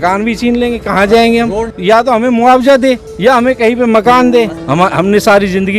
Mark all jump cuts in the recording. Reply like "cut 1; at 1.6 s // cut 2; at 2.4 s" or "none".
cut 1; at 1.7 s // cut 2; at 4.6 s

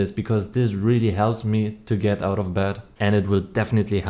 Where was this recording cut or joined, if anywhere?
cut 1; at 2.9 s

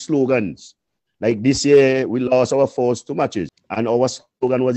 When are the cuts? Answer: cut 1; at 3.6 s

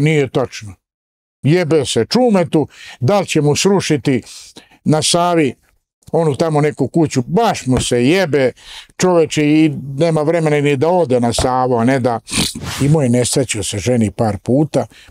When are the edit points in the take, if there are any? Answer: cut 1; at 12.6 s

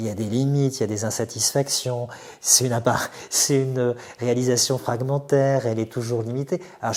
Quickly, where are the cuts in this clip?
none

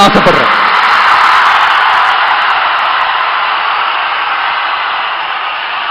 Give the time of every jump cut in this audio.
none

